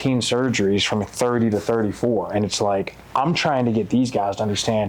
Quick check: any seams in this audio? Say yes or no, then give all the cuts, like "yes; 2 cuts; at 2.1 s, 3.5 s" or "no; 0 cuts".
no; 0 cuts